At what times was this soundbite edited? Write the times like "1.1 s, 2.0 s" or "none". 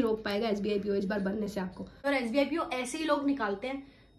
2.1 s